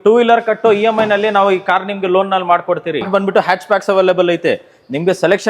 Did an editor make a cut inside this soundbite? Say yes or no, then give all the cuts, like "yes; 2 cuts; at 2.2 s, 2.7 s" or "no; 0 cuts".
yes; 1 cut; at 3.1 s